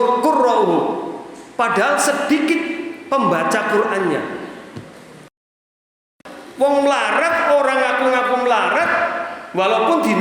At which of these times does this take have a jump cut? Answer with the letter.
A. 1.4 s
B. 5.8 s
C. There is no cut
B